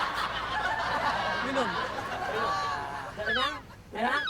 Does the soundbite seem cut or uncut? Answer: uncut